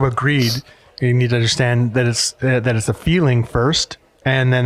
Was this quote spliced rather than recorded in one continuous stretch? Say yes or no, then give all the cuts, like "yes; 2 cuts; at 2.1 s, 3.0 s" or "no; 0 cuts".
no; 0 cuts